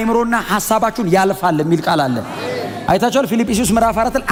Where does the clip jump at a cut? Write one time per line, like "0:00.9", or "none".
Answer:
none